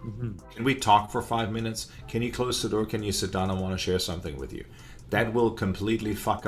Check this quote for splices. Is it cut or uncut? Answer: uncut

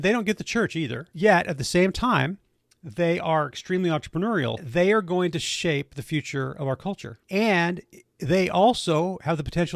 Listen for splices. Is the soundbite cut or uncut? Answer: cut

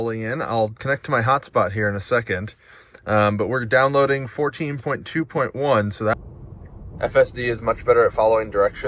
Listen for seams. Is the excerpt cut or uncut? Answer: cut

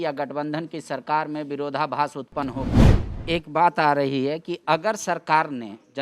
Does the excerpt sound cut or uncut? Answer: cut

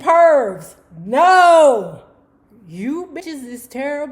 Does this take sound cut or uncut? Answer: cut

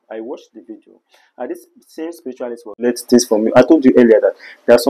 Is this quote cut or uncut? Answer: cut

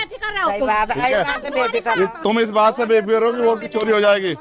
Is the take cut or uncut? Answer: uncut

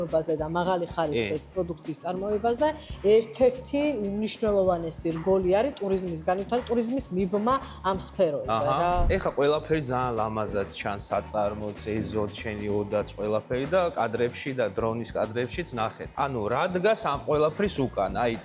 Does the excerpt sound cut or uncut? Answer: uncut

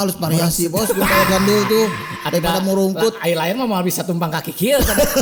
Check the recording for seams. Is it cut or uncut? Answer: uncut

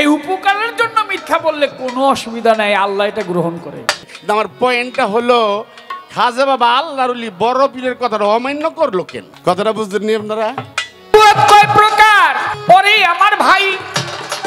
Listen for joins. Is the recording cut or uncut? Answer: cut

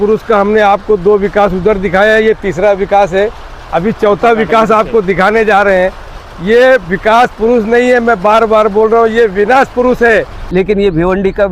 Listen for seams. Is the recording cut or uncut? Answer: cut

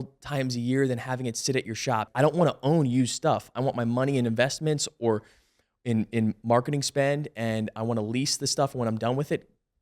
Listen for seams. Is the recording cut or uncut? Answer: cut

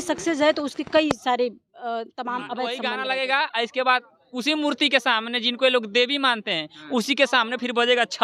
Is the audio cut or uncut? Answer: cut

